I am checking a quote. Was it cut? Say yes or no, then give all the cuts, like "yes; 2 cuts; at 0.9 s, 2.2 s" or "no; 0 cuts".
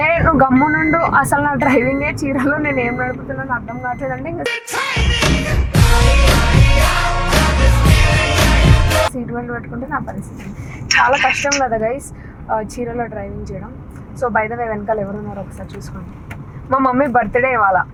no; 0 cuts